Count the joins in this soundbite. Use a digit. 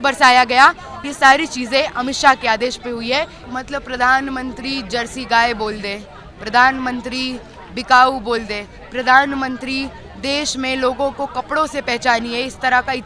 2